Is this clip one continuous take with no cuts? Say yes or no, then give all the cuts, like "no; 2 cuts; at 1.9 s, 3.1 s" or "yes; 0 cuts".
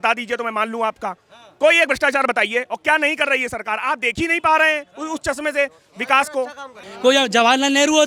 yes; 0 cuts